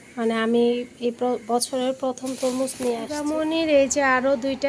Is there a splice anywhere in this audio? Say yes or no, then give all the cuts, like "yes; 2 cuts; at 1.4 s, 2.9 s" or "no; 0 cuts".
yes; 1 cut; at 3.1 s